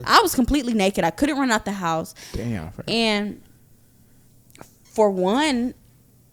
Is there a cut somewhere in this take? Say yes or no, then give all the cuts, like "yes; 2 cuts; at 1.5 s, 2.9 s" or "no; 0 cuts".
no; 0 cuts